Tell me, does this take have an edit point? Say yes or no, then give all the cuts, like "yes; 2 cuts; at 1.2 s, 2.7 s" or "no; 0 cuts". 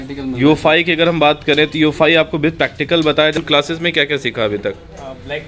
yes; 1 cut; at 3.4 s